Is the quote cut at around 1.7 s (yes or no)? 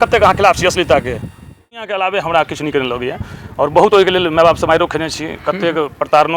yes